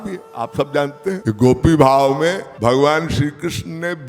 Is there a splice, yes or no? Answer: yes